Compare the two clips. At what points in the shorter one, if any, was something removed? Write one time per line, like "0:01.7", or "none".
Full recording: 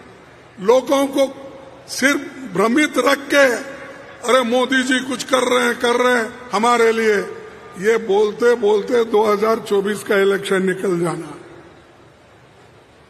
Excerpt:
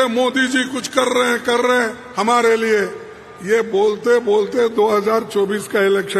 none